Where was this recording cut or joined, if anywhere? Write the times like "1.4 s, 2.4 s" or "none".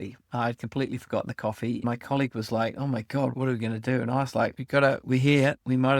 1.8 s